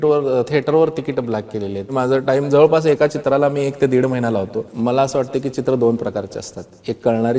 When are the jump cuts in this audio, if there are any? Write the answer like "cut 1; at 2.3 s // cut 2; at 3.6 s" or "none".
cut 1; at 1.9 s // cut 2; at 4.7 s